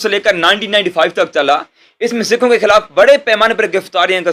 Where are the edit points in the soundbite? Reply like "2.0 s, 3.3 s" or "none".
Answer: none